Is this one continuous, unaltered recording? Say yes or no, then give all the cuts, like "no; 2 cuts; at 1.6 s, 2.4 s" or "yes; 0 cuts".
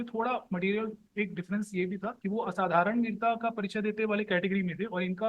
no; 1 cut; at 2.2 s